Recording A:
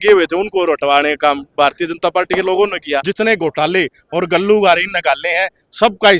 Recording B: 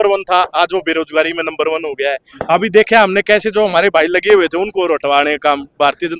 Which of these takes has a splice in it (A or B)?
A